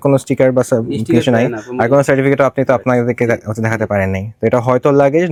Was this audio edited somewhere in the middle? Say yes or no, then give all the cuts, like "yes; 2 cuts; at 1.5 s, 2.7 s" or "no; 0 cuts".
no; 0 cuts